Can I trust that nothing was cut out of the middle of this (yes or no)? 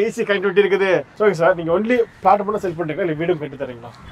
no